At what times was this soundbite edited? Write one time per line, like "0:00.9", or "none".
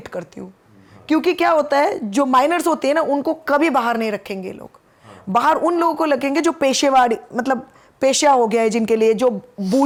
none